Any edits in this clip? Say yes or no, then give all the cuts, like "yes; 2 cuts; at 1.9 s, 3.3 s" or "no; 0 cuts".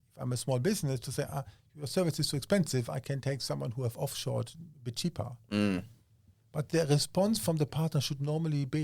no; 0 cuts